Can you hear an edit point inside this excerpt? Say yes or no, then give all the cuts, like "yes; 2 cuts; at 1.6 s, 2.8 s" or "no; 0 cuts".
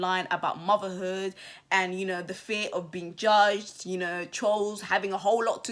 no; 0 cuts